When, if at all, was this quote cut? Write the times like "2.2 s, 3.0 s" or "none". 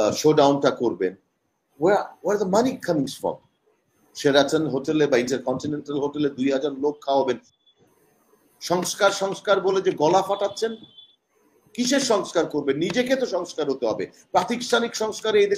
7.5 s